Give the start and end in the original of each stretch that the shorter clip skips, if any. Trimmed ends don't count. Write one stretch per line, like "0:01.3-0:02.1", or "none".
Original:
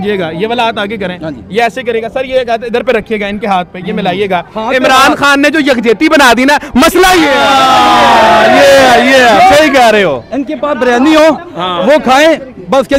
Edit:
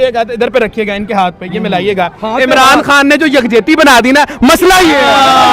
none